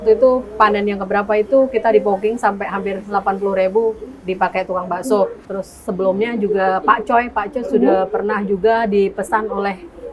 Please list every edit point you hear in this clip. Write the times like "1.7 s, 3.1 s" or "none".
5.4 s